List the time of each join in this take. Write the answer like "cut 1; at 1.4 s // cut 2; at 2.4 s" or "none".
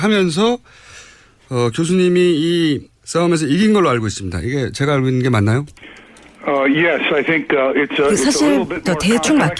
none